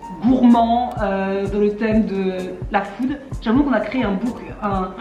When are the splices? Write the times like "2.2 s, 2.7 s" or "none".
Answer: none